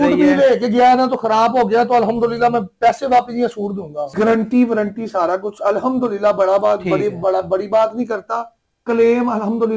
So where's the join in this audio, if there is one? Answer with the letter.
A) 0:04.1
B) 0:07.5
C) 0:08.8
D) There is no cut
A